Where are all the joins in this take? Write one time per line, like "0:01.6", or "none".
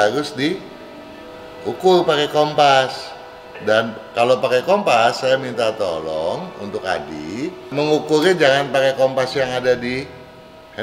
0:07.7